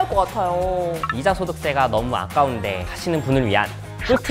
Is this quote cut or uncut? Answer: cut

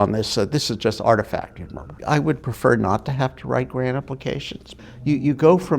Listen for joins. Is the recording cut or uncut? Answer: cut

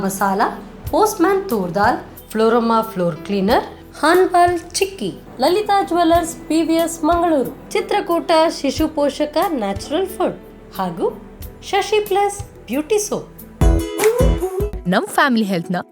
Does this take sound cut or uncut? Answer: cut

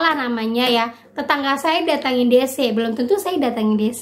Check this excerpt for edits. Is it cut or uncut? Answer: uncut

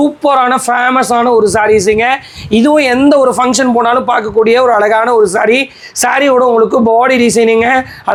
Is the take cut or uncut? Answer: uncut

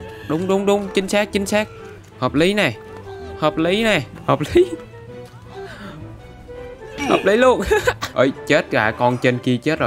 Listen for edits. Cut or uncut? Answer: cut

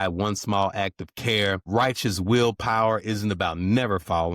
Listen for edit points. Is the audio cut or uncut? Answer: cut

